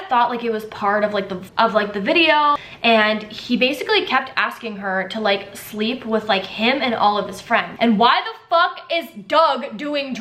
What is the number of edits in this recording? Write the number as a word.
two